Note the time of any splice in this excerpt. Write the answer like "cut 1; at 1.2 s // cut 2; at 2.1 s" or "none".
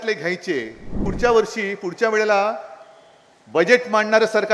cut 1; at 1.0 s